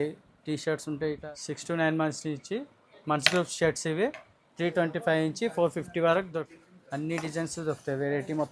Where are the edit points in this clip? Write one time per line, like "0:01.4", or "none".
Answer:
0:01.2
0:06.4